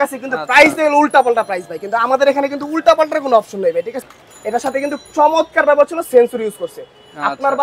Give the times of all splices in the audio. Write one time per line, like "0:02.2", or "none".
0:04.0

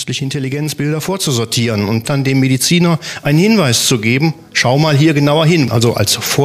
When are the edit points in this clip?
0:02.1
0:05.7

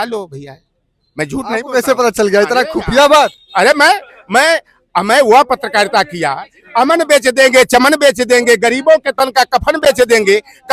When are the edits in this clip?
none

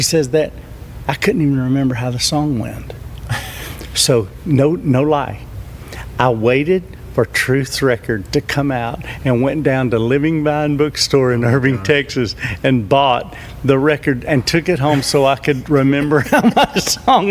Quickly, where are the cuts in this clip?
none

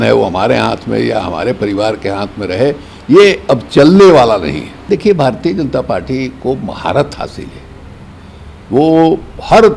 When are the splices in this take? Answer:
0:04.8

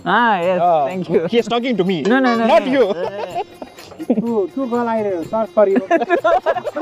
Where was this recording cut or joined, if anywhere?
0:03.9

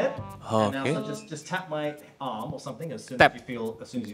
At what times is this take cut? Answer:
none

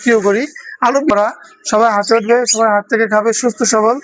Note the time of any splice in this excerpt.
0:01.1

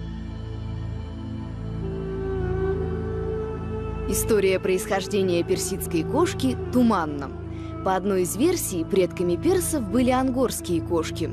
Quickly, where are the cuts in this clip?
0:00.9

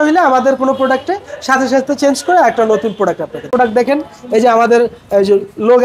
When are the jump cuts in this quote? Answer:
0:03.5

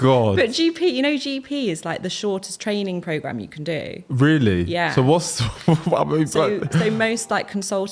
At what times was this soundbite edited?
none

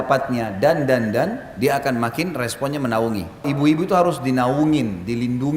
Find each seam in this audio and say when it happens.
0:03.5

